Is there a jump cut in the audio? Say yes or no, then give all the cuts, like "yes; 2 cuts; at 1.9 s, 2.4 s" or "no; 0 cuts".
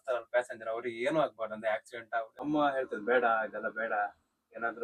yes; 1 cut; at 2.4 s